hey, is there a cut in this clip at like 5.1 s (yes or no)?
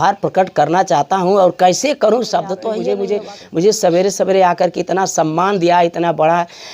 no